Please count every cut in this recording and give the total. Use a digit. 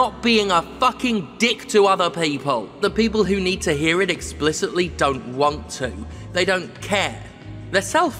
1